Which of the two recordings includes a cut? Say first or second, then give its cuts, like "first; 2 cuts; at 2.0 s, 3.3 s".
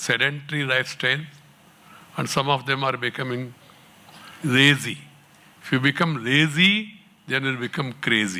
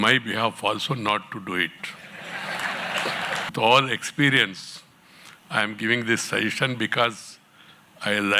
second; 1 cut; at 3.5 s